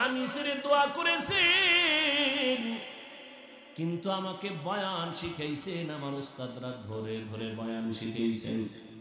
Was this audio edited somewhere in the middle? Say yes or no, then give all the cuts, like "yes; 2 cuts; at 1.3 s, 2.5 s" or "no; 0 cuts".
no; 0 cuts